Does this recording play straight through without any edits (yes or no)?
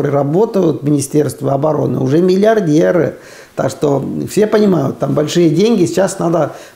yes